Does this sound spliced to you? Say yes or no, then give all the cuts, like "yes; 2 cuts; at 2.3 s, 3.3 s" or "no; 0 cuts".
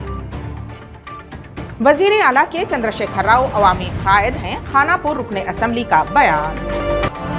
yes; 1 cut; at 1.7 s